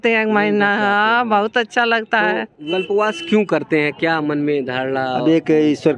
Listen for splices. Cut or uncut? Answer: cut